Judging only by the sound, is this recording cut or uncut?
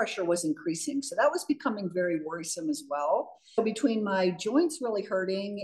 cut